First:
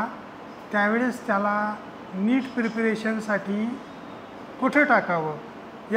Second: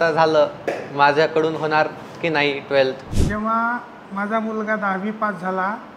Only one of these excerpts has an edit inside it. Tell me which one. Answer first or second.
second